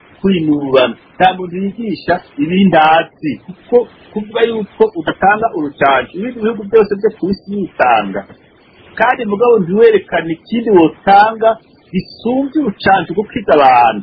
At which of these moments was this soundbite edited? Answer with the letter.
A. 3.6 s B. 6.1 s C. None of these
C